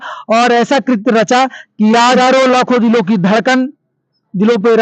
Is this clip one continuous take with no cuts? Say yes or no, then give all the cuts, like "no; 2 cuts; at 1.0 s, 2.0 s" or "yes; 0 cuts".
no; 1 cut; at 2.2 s